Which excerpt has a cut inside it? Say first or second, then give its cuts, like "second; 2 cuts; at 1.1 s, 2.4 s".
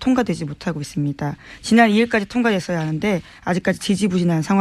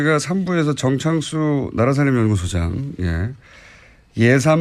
second; 1 cut; at 2.4 s